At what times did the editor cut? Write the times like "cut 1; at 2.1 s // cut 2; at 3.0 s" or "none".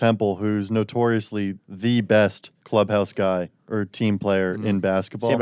none